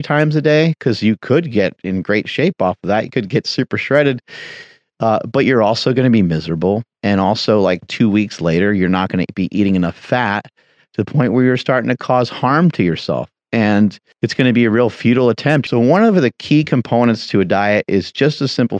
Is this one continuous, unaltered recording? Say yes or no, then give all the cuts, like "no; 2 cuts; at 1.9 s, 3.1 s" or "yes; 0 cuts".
no; 2 cuts; at 14.1 s, 15.6 s